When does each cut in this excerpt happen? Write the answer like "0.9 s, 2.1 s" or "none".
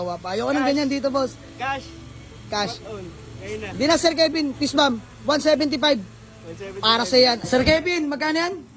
7.4 s